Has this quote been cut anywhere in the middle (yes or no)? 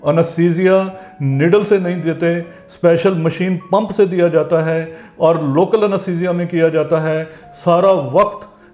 no